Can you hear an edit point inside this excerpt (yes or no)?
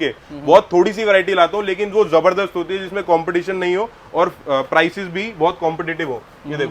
no